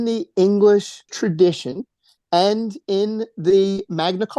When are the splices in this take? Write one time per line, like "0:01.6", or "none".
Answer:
0:01.1